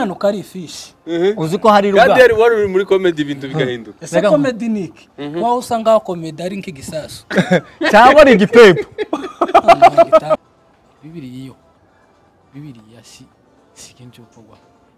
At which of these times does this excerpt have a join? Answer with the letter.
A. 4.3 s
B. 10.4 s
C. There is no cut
B